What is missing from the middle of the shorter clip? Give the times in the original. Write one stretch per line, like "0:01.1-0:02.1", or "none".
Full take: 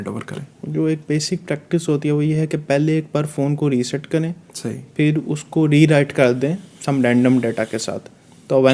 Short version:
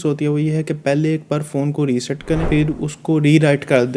0:04.3-0:04.9